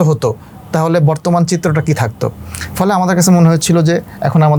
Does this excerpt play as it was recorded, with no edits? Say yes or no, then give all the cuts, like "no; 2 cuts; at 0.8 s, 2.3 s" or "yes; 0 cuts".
yes; 0 cuts